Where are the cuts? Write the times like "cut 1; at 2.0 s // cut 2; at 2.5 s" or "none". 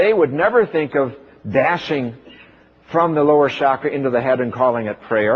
cut 1; at 1.5 s